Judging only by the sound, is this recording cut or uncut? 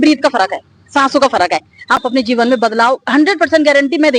cut